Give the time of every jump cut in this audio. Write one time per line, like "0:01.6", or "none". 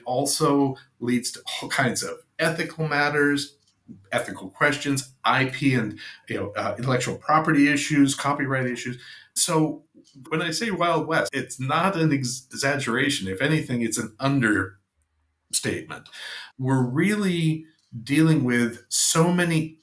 none

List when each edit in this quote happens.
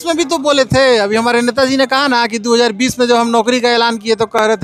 none

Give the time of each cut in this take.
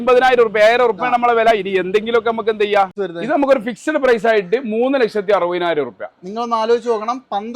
0:02.9

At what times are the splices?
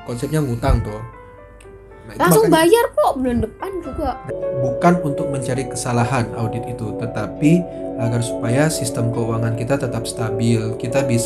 0:04.3

